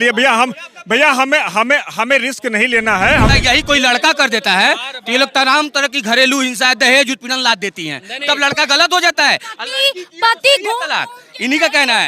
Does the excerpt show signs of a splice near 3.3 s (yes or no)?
yes